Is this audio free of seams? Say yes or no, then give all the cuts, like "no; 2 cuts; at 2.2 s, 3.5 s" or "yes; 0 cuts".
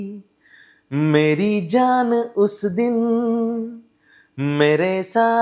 yes; 0 cuts